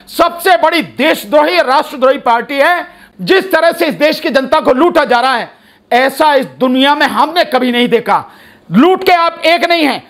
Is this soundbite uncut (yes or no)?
no